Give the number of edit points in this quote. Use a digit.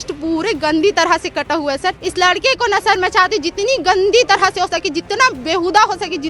1